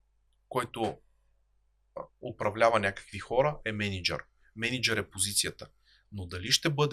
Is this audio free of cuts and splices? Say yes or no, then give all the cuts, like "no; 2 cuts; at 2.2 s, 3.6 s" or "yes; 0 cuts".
yes; 0 cuts